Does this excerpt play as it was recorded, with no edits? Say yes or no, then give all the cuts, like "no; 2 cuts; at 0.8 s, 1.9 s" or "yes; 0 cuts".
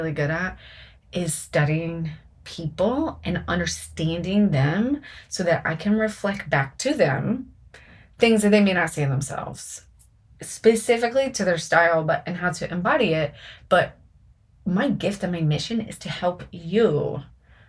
yes; 0 cuts